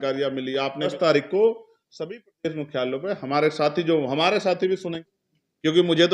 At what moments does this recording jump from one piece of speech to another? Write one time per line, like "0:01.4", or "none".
0:00.9
0:05.0